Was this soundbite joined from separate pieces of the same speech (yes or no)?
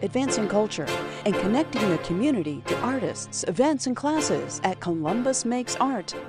no